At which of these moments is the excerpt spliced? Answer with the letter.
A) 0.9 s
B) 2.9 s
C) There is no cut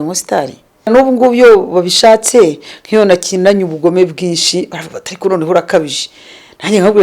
A